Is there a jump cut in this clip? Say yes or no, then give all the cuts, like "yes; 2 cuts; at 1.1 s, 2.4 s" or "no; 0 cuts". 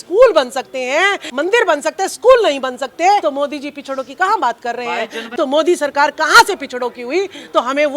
yes; 3 cuts; at 1.2 s, 3.2 s, 5.2 s